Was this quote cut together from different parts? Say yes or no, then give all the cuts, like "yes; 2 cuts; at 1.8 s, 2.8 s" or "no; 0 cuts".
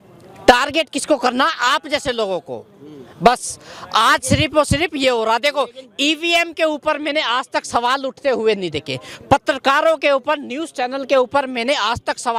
no; 0 cuts